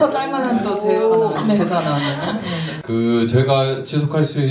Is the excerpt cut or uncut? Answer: cut